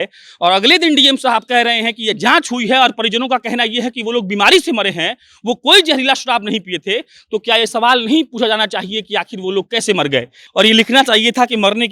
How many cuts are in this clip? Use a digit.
1